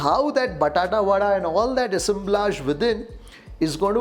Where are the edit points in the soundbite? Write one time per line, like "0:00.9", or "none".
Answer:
none